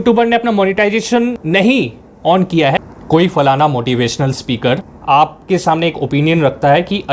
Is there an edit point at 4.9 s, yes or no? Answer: yes